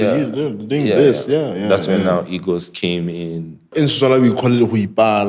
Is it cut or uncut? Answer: cut